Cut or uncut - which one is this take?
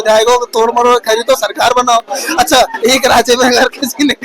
uncut